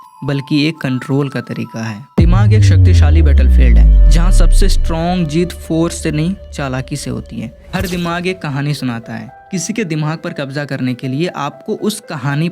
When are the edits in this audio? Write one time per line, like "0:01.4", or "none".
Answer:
0:02.2
0:07.6